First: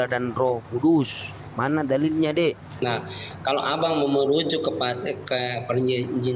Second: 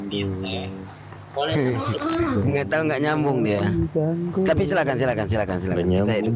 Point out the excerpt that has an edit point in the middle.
first; 1 cut; at 2.7 s

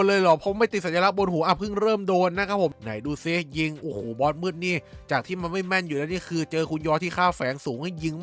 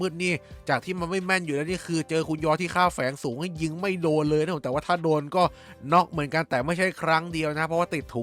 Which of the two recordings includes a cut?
first; 1 cut; at 2.7 s

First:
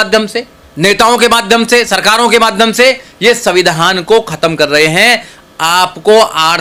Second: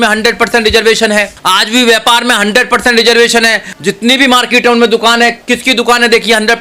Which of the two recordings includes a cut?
second; 1 cut; at 1.4 s

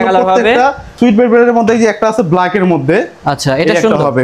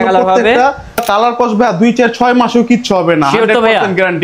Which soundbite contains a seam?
second; 1 cut; at 1.0 s

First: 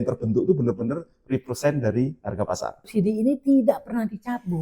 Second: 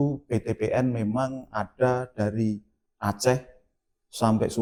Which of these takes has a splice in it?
first; 1 cut; at 2.9 s

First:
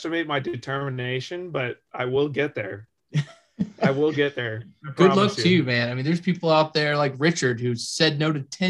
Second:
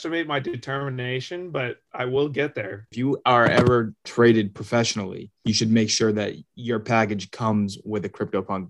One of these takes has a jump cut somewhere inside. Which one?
second; 1 cut; at 2.9 s

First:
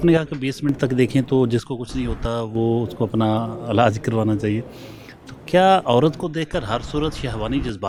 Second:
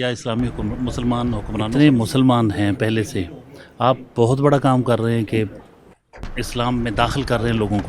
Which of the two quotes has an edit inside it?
second; 1 cut; at 1.7 s

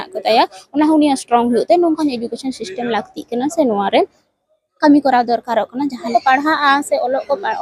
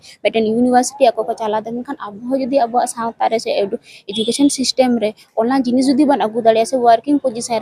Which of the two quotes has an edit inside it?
first; 1 cut; at 6.0 s

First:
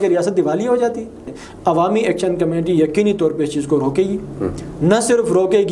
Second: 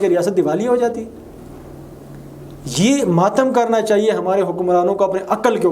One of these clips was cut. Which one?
first; 1 cut; at 1.4 s

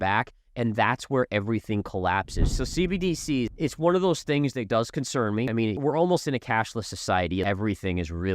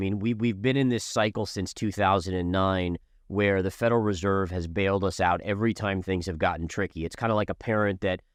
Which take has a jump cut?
first; 4 cuts; at 2.5 s, 3.5 s, 5.7 s, 7.4 s

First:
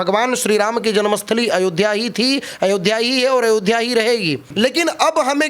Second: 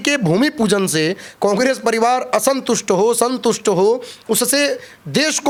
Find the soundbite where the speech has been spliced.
first; 1 cut; at 4.4 s

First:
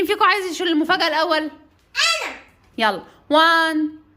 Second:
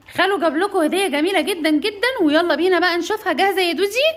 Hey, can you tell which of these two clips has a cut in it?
first; 1 cut; at 2.6 s

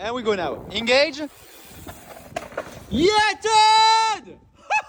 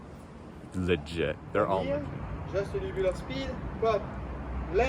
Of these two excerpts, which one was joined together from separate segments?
second; 1 cut; at 1.8 s

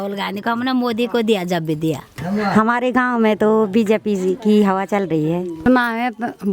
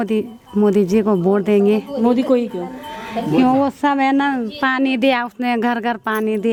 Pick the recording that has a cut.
first; 2 cuts; at 2.1 s, 5.7 s

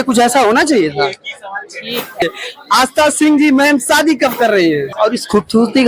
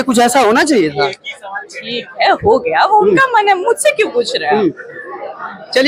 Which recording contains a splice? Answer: first; 2 cuts; at 2.2 s, 4.9 s

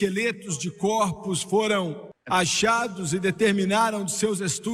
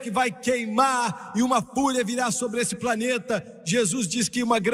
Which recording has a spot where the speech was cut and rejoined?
first; 1 cut; at 2.1 s

